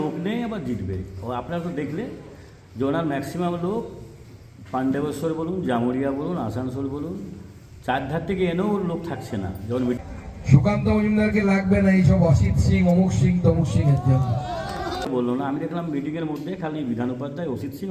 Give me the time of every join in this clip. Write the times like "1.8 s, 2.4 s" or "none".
10.0 s, 15.1 s